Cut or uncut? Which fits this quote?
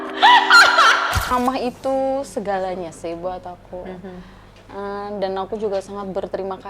cut